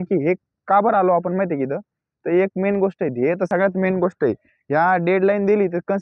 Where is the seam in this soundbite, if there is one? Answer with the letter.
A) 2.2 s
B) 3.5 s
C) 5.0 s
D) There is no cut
B